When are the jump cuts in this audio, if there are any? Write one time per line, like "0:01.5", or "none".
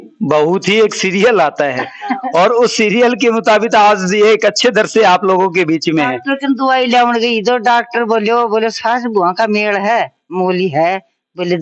none